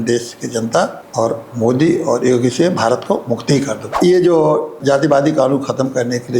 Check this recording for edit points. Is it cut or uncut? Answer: cut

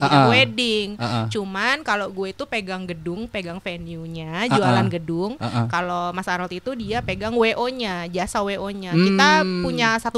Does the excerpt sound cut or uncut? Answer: uncut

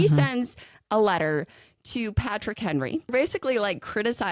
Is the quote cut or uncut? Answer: cut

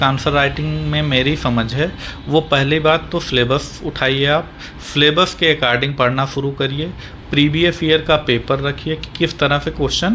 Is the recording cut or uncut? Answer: uncut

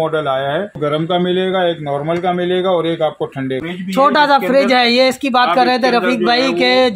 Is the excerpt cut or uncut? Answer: cut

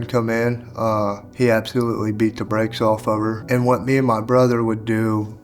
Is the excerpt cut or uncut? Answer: cut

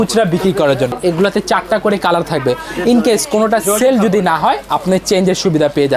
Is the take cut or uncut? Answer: cut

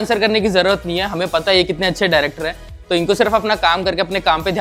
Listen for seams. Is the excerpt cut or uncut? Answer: uncut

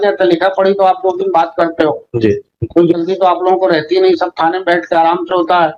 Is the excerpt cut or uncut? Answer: uncut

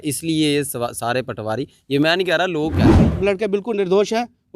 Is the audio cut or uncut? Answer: cut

